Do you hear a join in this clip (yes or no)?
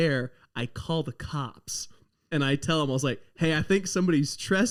no